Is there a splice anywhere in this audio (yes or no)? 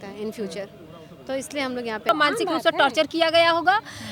yes